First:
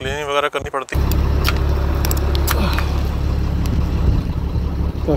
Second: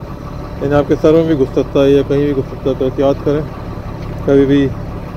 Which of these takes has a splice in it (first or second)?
first